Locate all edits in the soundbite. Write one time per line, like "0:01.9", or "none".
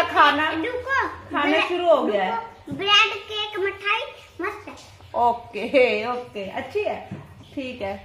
none